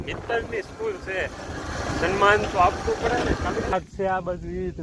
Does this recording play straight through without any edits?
no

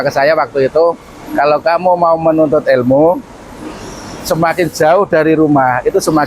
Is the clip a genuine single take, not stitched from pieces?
yes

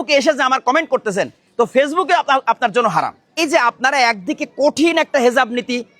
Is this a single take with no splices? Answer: no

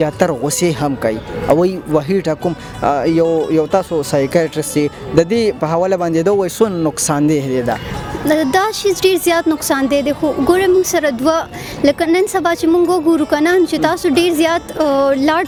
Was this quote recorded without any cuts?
yes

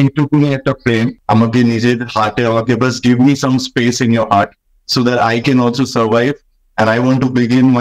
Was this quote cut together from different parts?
no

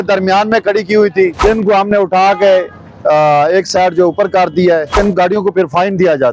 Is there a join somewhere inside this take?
yes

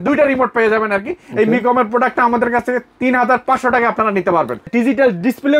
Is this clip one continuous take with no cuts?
no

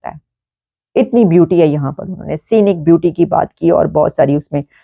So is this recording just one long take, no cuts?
yes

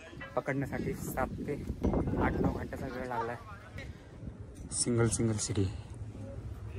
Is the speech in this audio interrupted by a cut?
yes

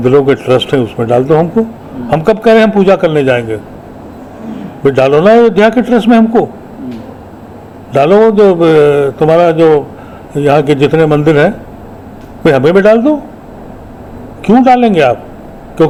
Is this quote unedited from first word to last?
yes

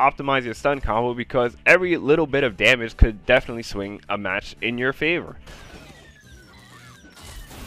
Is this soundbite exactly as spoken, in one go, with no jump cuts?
no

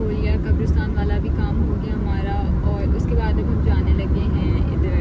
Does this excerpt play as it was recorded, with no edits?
yes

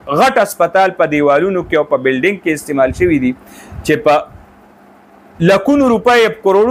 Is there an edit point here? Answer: no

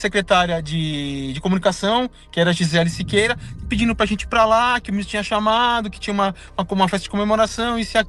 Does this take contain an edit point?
no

